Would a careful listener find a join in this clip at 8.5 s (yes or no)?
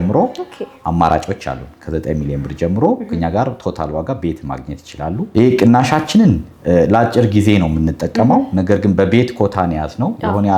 no